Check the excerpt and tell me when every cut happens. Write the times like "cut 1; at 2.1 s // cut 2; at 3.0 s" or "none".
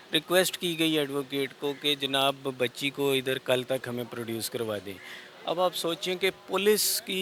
none